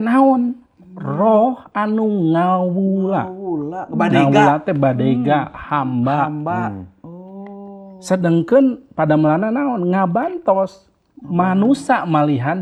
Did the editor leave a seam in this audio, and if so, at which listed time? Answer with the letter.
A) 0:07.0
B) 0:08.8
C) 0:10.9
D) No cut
D